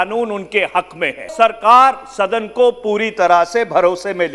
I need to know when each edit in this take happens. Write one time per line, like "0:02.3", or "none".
0:01.3